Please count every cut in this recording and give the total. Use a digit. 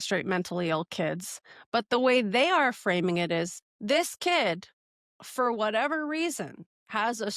1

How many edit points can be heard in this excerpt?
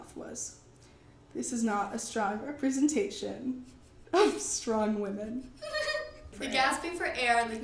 1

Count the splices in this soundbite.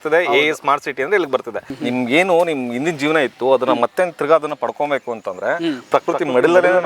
1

